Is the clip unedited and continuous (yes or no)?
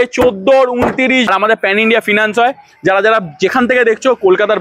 no